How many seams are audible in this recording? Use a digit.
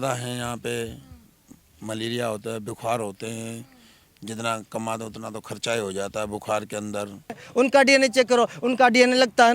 1